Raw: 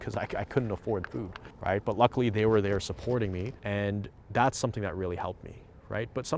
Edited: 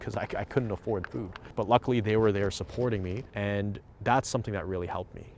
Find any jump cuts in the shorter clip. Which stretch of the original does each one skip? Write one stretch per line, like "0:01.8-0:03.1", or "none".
0:01.5-0:01.8